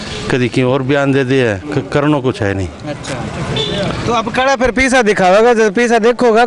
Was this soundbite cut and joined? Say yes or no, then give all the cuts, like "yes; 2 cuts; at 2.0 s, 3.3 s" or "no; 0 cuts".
no; 0 cuts